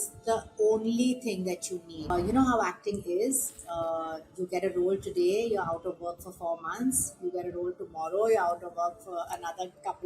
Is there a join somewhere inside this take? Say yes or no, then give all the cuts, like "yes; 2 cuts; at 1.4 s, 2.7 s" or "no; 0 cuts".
yes; 1 cut; at 2.1 s